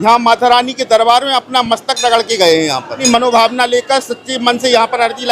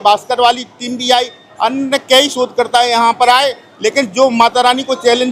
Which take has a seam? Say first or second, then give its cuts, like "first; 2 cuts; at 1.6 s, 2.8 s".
first; 1 cut; at 3.0 s